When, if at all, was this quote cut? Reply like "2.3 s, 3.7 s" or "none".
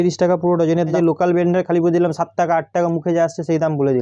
0.9 s